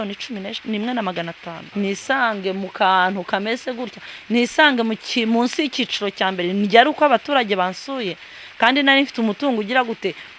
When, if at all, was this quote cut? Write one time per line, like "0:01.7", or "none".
0:01.5